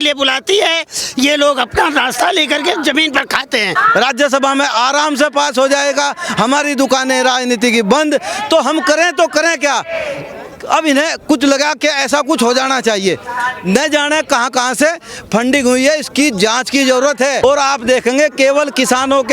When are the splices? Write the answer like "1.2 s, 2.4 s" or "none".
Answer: 3.7 s, 17.4 s